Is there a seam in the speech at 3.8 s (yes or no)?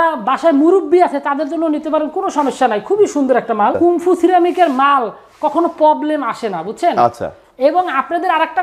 yes